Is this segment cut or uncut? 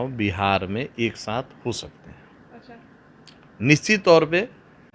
uncut